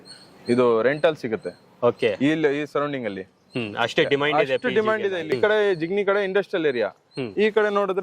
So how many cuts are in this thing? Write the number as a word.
one